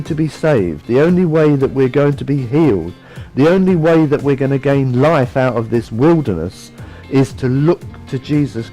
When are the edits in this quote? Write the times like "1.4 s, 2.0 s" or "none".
none